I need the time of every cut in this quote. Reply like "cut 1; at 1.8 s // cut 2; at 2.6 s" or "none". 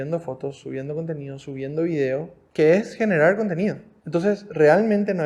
cut 1; at 2.4 s // cut 2; at 3.9 s